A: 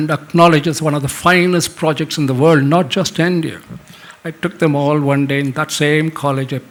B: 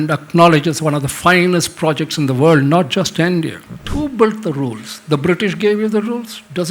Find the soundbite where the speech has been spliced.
B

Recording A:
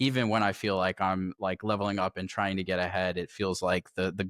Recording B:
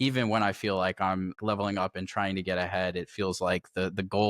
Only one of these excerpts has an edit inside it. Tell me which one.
B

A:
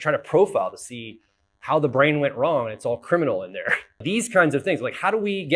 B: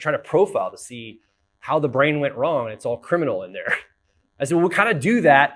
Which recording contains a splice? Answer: A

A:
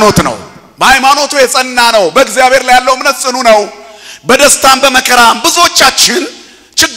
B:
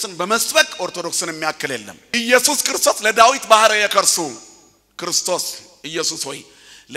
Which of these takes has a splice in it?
B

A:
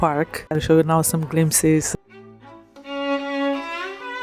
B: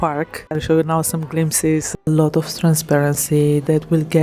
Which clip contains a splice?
B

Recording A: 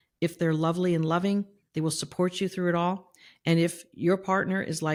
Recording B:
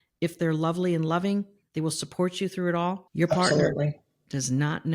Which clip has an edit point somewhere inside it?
B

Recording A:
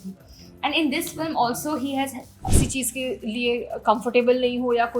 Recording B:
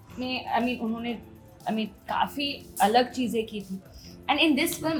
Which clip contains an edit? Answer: A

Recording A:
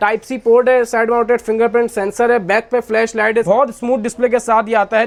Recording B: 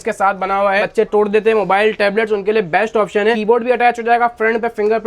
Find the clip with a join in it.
B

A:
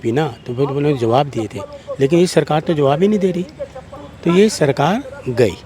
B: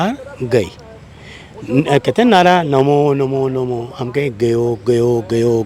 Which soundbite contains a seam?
A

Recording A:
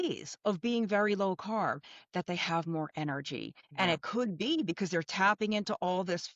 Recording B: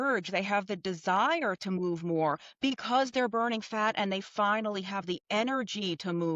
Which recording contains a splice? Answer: A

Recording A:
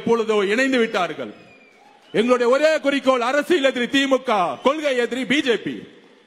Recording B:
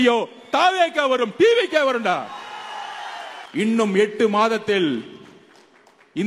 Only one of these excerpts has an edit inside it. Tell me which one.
B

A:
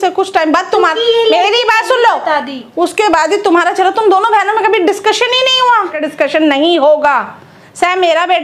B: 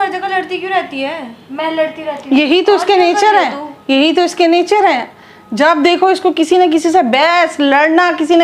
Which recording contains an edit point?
A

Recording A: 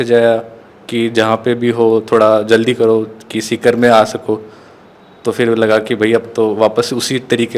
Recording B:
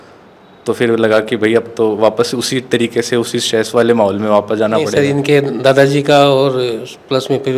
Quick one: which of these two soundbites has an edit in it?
B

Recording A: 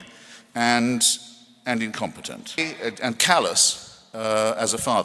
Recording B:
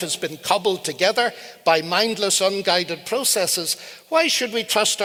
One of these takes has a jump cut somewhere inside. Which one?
A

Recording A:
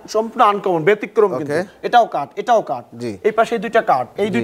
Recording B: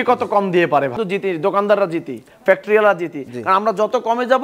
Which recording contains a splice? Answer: B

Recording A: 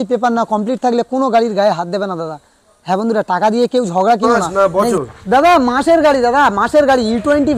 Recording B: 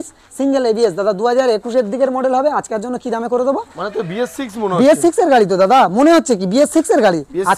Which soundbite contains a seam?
A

